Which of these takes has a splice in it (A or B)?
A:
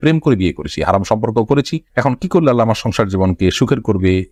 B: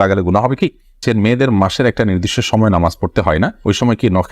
B